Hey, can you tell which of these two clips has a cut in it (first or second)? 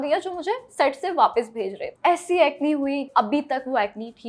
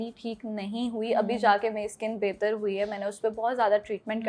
first